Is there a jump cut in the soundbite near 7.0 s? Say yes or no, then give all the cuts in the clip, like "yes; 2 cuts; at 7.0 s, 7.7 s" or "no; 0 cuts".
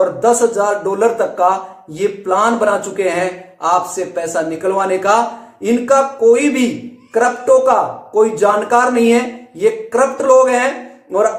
no; 0 cuts